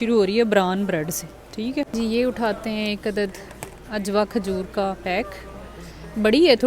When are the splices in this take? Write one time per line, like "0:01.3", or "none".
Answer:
0:01.9